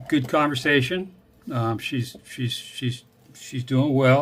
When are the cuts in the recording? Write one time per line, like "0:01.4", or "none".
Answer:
none